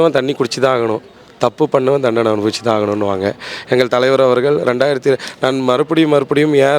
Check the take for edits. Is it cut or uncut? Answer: uncut